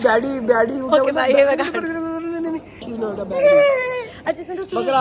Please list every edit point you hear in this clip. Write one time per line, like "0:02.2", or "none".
0:02.9
0:04.1